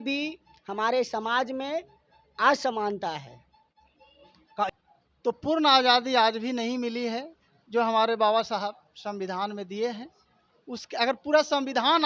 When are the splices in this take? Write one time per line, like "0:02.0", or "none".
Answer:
0:04.7